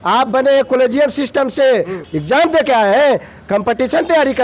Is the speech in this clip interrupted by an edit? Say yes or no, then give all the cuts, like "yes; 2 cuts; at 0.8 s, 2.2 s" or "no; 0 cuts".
yes; 1 cut; at 2.0 s